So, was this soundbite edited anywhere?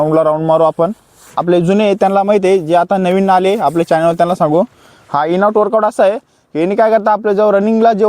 yes; 1 cut; at 1.3 s

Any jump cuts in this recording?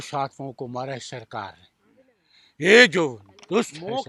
no; 0 cuts

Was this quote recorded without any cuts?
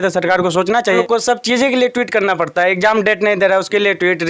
no; 1 cut; at 1.0 s

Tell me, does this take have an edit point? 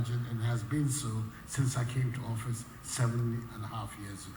no; 0 cuts

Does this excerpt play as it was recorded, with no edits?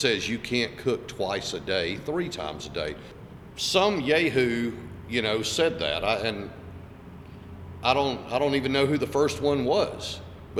no; 1 cut; at 3.1 s

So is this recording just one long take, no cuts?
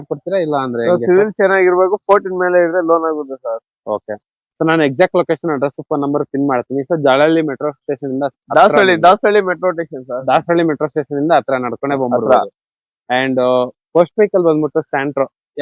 yes; 0 cuts

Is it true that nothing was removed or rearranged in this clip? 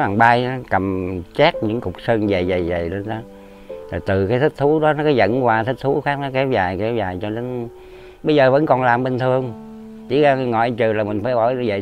yes; 0 cuts

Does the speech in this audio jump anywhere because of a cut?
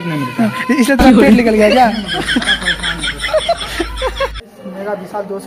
yes; 1 cut; at 4.4 s

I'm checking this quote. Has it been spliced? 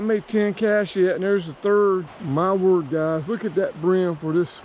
yes; 1 cut; at 2.1 s

